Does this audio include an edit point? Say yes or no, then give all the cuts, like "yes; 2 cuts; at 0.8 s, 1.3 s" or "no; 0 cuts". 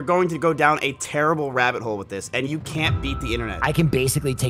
yes; 1 cut; at 3.5 s